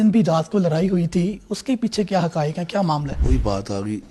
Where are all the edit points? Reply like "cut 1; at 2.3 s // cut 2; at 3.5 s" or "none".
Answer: cut 1; at 3.1 s